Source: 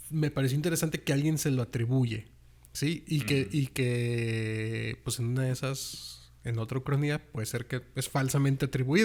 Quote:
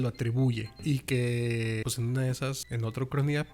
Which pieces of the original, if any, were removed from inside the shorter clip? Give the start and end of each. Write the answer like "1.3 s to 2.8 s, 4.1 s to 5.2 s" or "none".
2.3 s to 3.5 s, 4.5 s to 5.0 s, 5.9 s to 6.4 s

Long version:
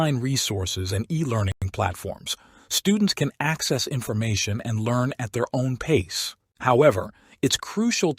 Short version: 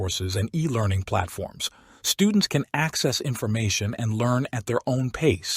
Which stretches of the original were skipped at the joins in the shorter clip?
1.6 s to 1.7 s

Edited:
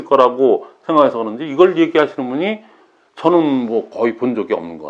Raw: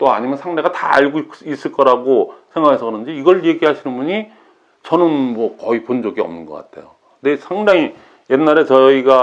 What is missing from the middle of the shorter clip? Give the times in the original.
none

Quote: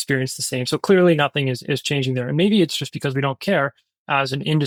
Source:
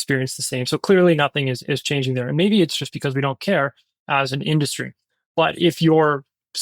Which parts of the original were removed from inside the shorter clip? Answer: none

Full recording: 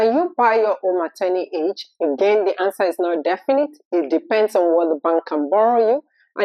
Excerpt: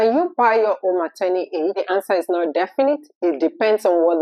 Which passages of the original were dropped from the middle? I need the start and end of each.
1.8 s to 2.5 s

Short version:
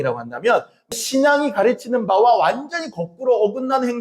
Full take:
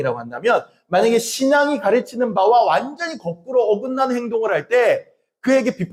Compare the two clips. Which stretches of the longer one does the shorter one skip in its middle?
0.9 s to 1.2 s

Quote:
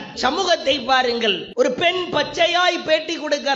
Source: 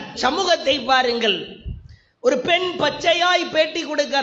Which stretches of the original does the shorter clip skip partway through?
1.4 s to 2.1 s

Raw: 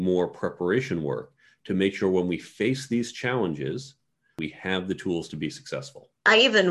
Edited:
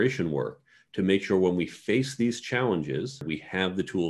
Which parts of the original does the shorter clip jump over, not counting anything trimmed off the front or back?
3.9 s to 4.3 s

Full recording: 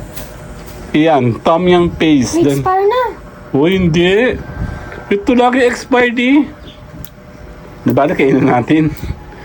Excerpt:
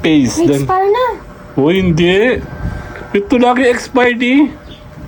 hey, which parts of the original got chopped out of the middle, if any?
none

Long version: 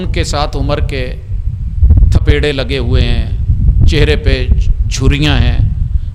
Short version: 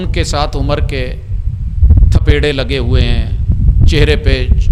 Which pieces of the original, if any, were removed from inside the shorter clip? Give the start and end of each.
none

